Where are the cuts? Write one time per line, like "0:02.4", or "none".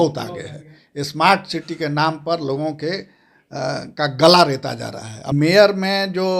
0:05.3